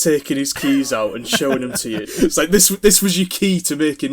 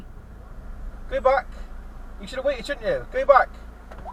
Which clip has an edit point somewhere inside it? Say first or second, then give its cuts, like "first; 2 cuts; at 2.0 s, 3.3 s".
first; 1 cut; at 2.1 s